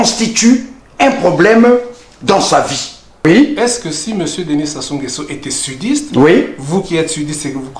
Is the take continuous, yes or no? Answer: no